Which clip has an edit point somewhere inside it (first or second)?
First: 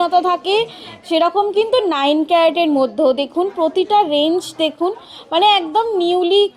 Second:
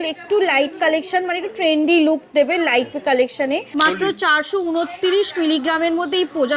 second